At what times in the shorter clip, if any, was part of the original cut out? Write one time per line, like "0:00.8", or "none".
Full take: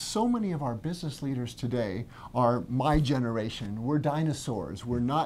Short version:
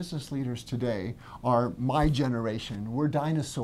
none